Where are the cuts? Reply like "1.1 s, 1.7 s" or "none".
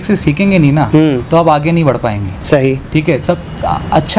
none